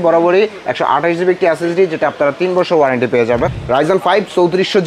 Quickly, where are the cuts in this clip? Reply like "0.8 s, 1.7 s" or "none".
3.6 s